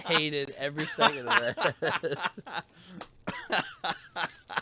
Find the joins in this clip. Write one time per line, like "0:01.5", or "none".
none